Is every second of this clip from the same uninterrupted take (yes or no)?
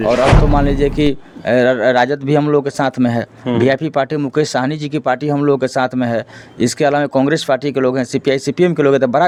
yes